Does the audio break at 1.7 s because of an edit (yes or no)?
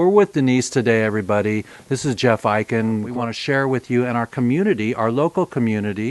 no